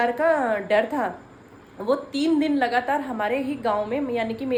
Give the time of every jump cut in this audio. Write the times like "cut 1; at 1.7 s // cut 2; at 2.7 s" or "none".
none